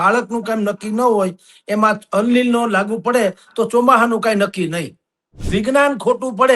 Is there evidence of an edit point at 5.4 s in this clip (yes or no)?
yes